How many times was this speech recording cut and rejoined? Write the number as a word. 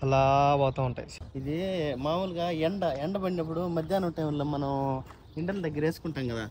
one